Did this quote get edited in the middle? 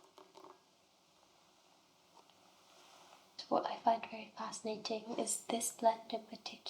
yes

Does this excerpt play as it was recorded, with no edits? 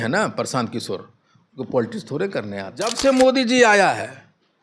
no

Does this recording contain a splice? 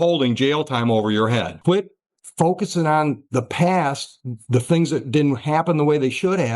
yes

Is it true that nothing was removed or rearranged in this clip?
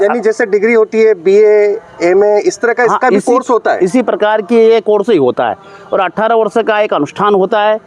yes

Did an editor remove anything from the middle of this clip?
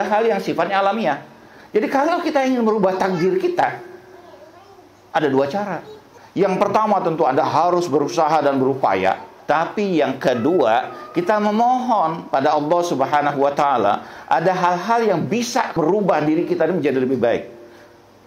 no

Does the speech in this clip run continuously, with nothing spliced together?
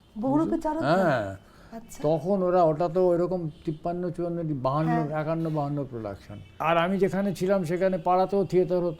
no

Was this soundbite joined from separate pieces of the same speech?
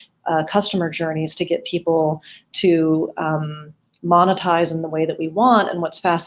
no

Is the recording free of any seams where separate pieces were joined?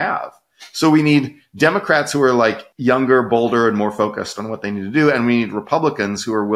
no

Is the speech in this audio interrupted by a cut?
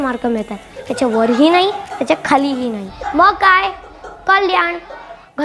yes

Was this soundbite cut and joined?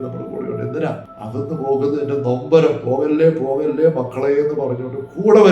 yes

